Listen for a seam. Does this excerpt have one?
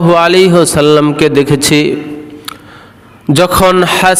no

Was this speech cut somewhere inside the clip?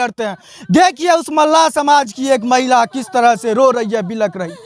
no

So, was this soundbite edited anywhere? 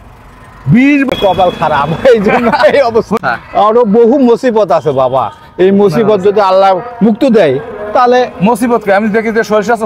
yes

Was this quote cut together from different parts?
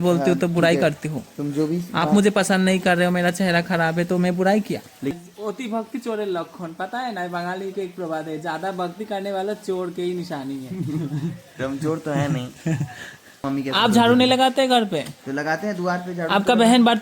yes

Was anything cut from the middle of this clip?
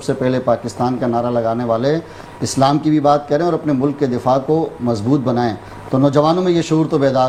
no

